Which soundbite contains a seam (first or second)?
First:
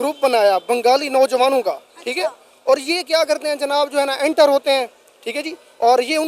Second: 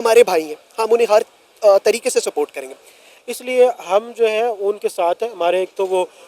second